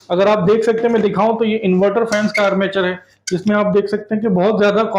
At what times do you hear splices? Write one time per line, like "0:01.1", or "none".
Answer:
none

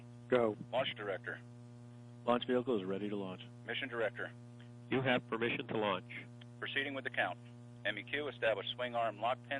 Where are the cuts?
none

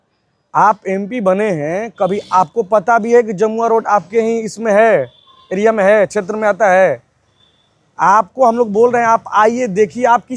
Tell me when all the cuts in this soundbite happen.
none

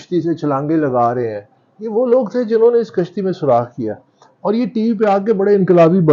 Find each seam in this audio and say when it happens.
none

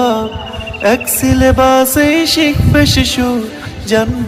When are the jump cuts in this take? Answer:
none

